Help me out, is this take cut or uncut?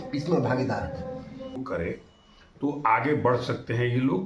cut